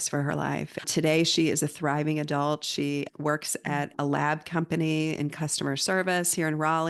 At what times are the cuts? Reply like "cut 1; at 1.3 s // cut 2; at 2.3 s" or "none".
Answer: none